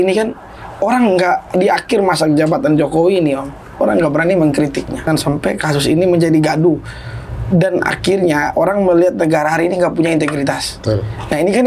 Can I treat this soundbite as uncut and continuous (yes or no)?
no